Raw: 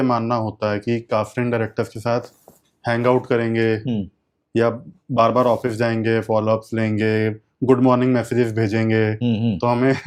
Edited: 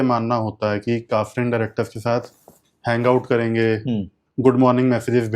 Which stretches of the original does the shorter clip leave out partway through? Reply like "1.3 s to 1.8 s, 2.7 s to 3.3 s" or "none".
4.2 s to 7.5 s